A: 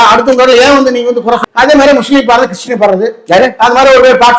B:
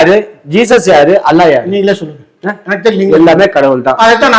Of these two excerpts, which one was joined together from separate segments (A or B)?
A